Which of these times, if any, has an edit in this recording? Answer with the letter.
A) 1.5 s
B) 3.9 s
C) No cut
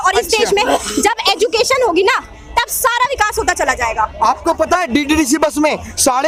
C